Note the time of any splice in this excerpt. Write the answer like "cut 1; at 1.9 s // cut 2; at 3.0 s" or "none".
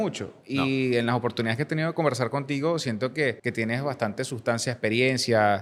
cut 1; at 3.4 s